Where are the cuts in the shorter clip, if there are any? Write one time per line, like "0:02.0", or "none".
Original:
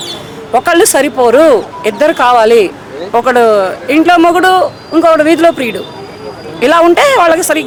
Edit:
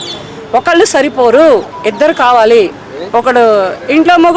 none